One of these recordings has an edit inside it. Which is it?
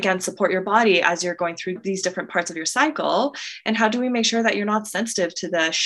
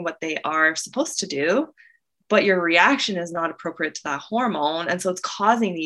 first; 1 cut; at 1.8 s

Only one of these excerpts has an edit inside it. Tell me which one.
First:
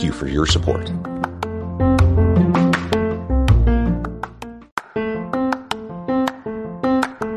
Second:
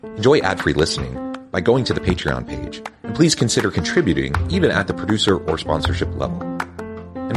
first; 1 cut; at 4.6 s

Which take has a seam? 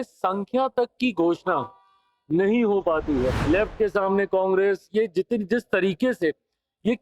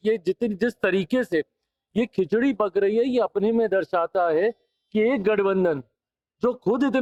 first; 1 cut; at 3.4 s

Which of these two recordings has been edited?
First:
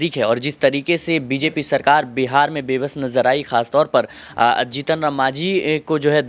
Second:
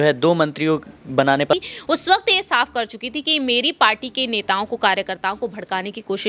second; 1 cut; at 1.5 s

